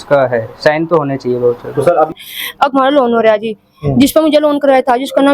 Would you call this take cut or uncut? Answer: cut